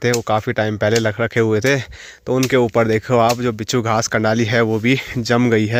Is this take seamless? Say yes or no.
yes